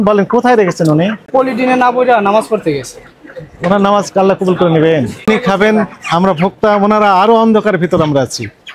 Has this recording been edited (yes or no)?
yes